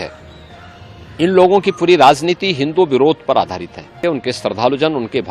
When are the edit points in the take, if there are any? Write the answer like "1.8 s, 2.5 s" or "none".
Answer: 4.0 s